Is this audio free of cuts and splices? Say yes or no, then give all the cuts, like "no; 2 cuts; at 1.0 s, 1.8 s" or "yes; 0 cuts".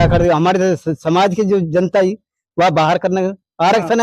yes; 0 cuts